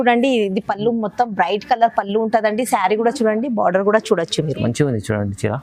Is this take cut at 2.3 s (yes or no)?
no